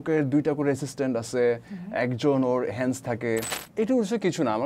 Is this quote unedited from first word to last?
no; 1 cut; at 3.7 s

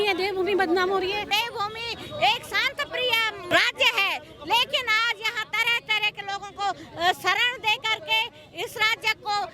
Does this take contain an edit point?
yes; 2 cuts; at 1.3 s, 3.5 s

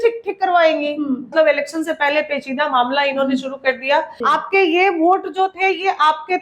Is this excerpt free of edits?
no; 2 cuts; at 1.3 s, 4.1 s

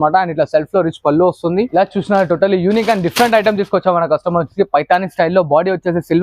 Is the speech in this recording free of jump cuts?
no; 1 cut; at 1.7 s

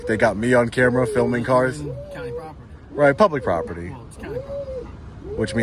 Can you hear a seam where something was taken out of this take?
no; 0 cuts

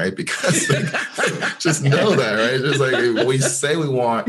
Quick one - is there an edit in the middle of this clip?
yes; 1 cut; at 3.2 s

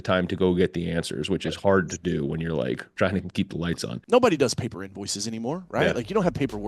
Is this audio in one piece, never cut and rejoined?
no; 1 cut; at 3.4 s

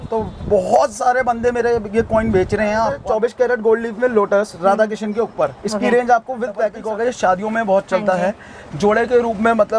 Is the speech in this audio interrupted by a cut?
yes; 2 cuts; at 3.0 s, 6.8 s

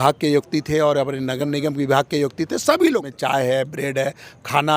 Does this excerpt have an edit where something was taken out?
yes; 1 cut; at 3.1 s

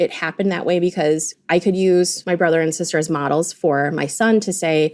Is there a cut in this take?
yes; 1 cut; at 1.3 s

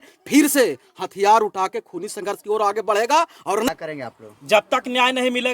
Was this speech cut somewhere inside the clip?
yes; 1 cut; at 3.7 s

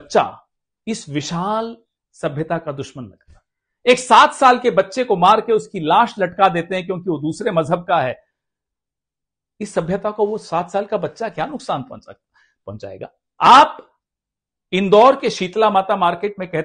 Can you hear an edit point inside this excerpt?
yes; 1 cut; at 13.2 s

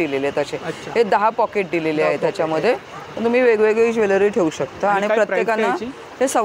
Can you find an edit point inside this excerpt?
no; 0 cuts

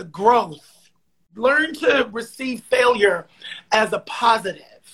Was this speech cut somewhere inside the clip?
yes; 1 cut; at 1.3 s

